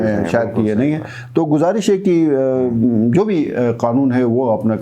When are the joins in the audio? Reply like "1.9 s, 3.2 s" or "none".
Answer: none